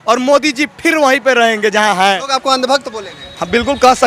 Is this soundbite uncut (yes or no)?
no